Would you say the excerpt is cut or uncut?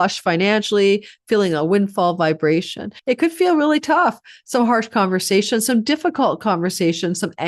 cut